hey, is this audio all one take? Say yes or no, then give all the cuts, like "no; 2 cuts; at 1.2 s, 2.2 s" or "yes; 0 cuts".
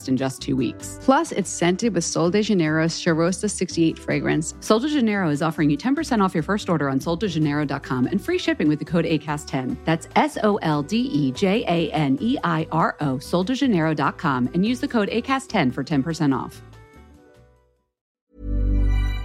no; 1 cut; at 18.2 s